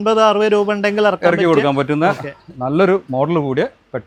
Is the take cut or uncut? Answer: uncut